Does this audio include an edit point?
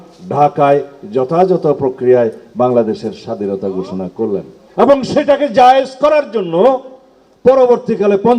yes; 1 cut; at 4.6 s

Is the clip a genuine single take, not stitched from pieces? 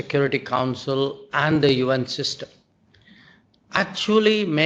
yes; 0 cuts

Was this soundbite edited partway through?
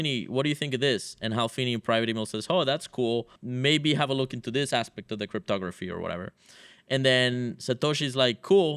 yes; 1 cut; at 3.4 s

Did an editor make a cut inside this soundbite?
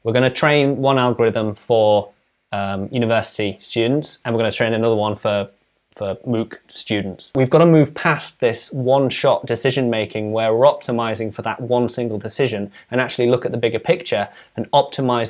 yes; 1 cut; at 7.3 s

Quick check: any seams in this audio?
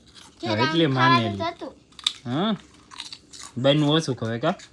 no; 0 cuts

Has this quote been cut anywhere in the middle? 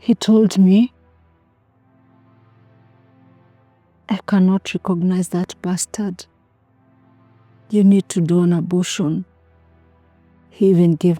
yes; 4 cuts; at 1.1 s, 4.1 s, 6.2 s, 7.7 s

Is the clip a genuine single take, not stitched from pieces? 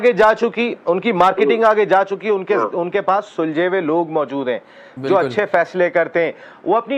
yes; 0 cuts

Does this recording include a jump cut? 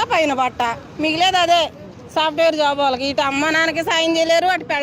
no; 0 cuts

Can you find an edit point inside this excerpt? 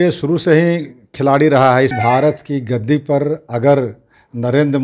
yes; 1 cut; at 1.9 s

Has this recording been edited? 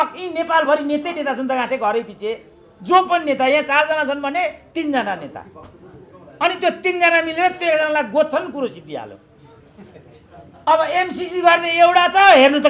no; 0 cuts

